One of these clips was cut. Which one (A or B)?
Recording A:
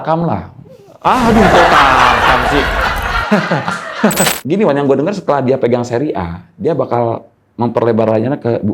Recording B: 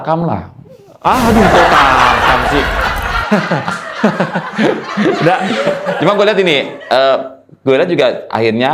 A